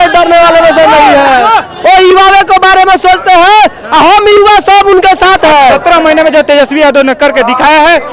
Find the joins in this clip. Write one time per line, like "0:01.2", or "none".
0:05.8